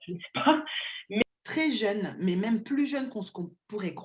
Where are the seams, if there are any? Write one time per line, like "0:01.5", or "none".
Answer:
0:01.2